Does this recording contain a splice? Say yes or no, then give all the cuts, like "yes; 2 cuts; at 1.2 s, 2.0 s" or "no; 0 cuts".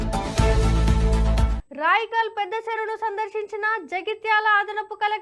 yes; 1 cut; at 1.6 s